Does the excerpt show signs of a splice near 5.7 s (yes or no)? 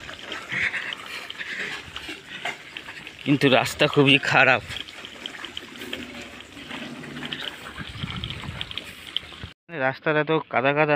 no